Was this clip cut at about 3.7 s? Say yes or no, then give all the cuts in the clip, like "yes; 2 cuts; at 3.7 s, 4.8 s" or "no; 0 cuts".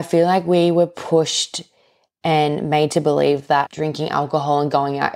yes; 1 cut; at 3.7 s